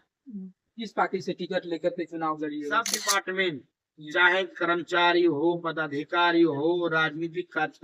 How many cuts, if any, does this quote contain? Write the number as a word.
one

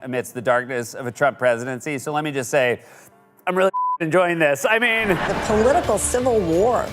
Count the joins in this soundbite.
one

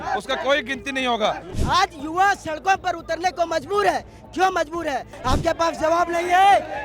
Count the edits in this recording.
two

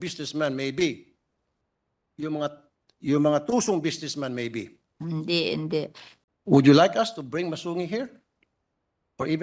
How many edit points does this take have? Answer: one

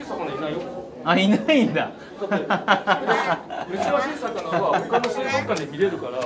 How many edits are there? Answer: zero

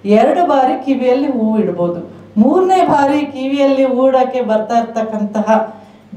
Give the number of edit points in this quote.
zero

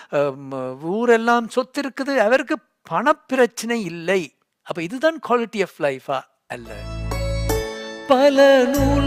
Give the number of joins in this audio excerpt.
one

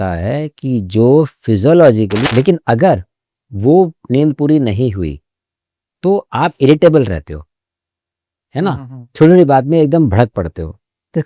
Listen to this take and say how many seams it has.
one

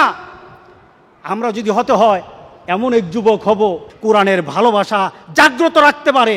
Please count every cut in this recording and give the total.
one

